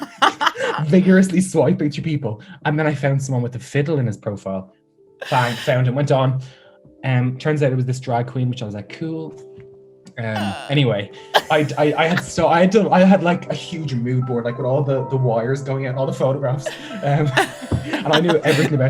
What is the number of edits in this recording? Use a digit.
0